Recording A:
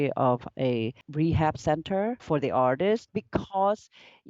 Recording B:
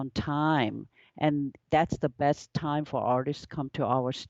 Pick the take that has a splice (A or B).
A